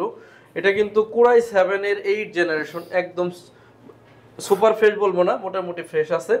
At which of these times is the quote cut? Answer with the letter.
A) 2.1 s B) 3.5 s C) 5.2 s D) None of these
D